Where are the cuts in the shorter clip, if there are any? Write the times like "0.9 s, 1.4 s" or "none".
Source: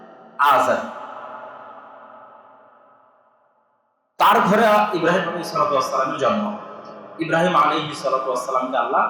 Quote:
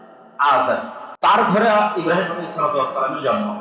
1.0 s